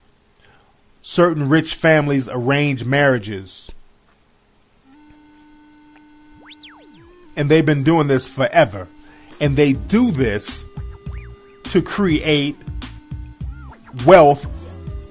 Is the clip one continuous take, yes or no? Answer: no